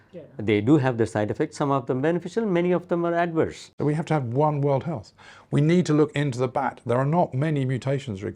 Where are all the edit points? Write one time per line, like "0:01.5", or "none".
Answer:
0:03.6